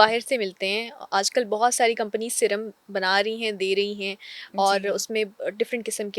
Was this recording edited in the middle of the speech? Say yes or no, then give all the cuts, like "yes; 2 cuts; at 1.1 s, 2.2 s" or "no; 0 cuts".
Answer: no; 0 cuts